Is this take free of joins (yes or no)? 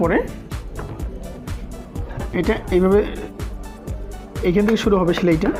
yes